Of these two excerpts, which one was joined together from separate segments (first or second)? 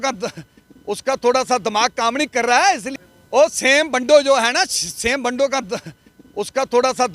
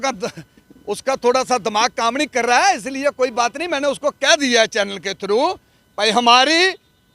first